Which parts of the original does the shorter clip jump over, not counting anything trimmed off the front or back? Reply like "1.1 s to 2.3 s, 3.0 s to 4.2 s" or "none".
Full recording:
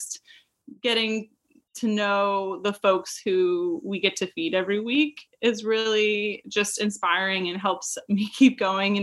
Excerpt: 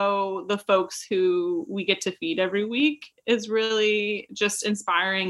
none